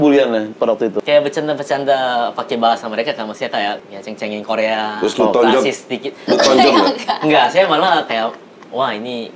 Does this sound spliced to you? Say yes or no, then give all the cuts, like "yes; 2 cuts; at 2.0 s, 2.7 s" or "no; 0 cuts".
yes; 3 cuts; at 1.0 s, 3.8 s, 8.5 s